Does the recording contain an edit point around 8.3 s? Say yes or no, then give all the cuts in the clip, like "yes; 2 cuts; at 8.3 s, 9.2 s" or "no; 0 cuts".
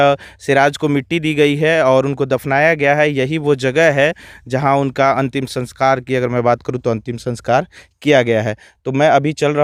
no; 0 cuts